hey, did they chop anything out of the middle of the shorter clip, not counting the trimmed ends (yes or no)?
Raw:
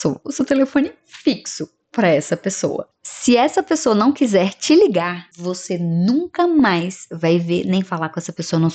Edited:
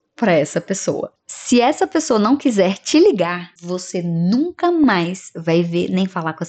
no